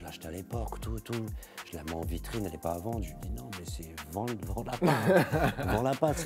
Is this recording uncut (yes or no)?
yes